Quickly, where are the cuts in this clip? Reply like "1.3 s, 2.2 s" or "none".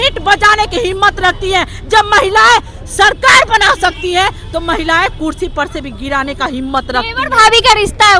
none